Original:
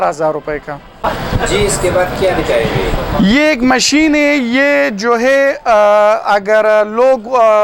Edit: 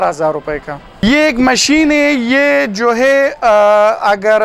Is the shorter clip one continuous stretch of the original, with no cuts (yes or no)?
no